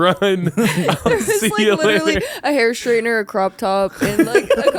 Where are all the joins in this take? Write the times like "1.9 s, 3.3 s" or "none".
none